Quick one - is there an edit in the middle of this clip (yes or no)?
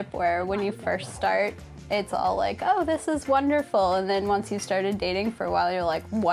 no